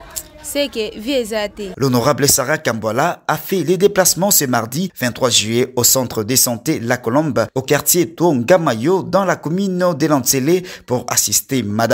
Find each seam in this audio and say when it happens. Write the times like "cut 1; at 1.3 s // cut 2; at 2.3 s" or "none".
cut 1; at 1.6 s